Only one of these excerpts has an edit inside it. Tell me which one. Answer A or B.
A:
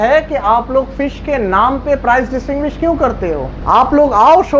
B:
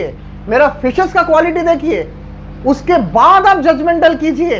A